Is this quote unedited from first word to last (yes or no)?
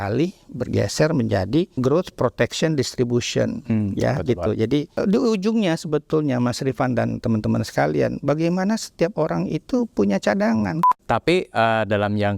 no